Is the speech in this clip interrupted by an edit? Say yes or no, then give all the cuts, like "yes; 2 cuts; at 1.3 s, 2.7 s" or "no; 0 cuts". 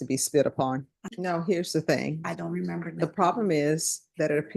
yes; 1 cut; at 1.0 s